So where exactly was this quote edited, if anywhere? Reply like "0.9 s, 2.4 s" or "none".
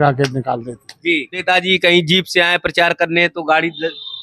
1.4 s